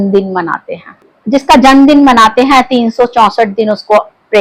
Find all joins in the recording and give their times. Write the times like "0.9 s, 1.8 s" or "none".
1.1 s